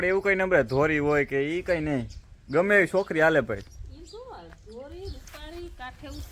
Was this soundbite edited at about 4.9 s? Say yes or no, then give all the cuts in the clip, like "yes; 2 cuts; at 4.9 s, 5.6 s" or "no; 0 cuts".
yes; 1 cut; at 4.9 s